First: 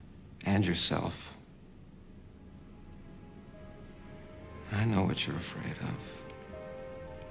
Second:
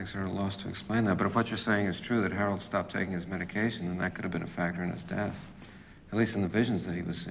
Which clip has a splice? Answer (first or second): second